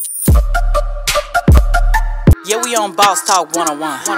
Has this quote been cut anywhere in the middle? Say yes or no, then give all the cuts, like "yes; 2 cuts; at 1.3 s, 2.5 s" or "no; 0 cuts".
no; 0 cuts